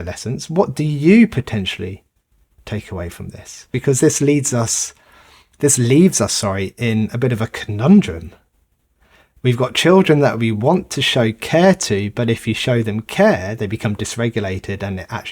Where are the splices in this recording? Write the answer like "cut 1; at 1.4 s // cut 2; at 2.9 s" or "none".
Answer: cut 1; at 3.6 s